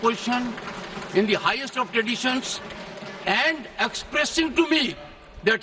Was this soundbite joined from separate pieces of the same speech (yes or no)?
no